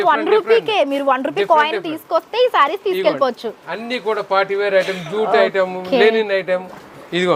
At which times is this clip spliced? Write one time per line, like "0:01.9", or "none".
none